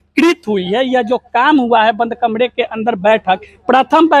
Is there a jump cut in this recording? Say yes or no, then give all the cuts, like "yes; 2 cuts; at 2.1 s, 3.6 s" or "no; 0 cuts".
no; 0 cuts